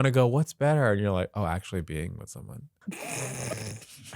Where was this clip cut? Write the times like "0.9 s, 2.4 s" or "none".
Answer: 2.6 s

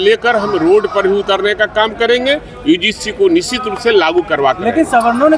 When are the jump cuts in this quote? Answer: none

